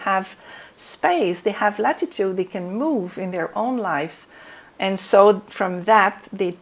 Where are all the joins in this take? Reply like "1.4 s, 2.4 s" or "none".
none

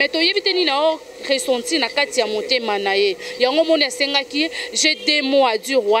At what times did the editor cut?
none

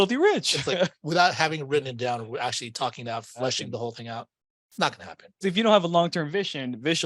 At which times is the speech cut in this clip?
1.0 s, 5.4 s

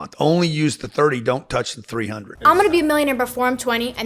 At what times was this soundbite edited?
2.3 s

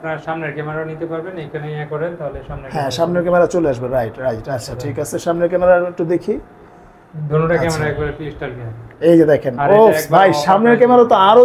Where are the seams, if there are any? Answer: none

